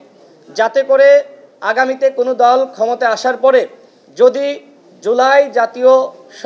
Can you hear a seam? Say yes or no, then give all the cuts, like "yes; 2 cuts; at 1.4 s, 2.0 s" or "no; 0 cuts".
no; 0 cuts